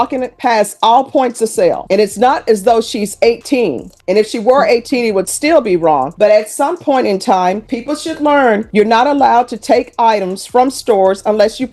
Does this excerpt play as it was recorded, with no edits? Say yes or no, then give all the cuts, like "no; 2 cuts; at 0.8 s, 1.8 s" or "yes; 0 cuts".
yes; 0 cuts